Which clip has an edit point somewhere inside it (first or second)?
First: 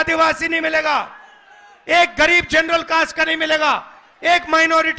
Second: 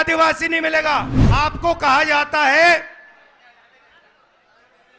second